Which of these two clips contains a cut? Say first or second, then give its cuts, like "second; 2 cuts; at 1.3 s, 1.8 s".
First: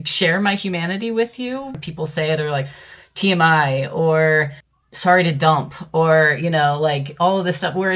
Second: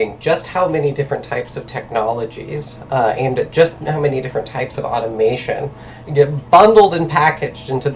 first; 2 cuts; at 1.7 s, 4.8 s